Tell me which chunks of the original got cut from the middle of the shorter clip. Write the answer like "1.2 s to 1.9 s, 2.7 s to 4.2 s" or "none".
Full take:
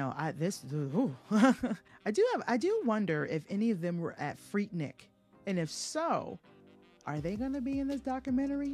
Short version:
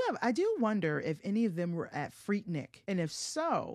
5.0 s to 5.3 s